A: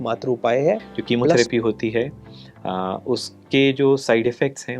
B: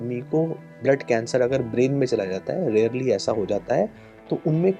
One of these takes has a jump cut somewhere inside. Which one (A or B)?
A